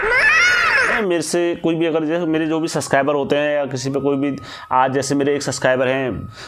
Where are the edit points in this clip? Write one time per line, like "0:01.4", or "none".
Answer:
0:01.0